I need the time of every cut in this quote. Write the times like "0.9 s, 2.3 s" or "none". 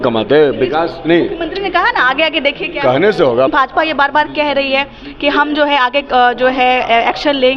3.5 s